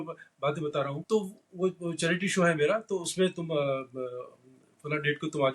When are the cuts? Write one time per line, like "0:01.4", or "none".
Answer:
0:01.0